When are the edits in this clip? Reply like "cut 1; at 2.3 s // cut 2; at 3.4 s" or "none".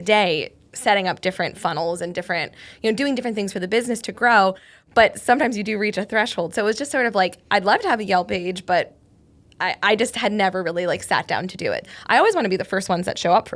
cut 1; at 11.8 s